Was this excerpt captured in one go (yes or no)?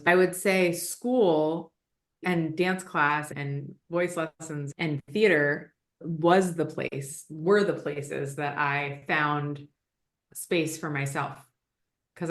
no